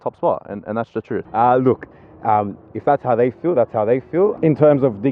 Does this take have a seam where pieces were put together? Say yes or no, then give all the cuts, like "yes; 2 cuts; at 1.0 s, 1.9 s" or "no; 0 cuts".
yes; 2 cuts; at 1.2 s, 4.4 s